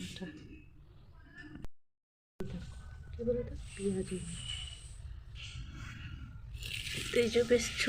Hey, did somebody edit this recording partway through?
yes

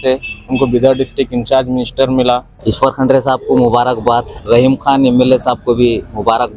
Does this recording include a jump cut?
yes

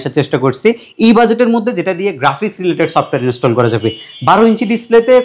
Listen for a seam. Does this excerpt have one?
no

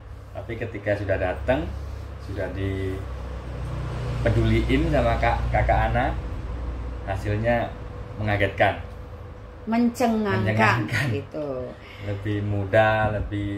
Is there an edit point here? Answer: no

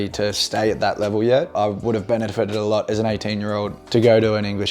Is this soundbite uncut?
no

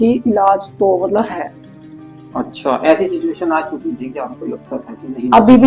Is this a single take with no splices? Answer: yes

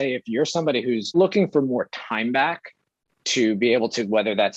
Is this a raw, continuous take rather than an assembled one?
no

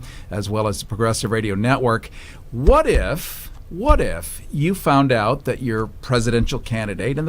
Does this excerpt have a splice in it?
yes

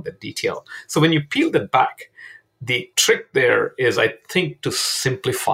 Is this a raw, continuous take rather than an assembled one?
yes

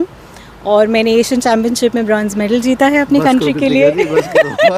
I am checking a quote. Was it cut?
no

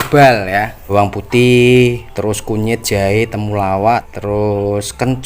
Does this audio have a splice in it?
yes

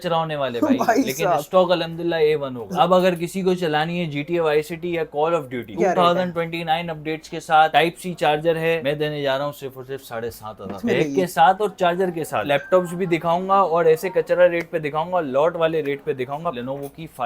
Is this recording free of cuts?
no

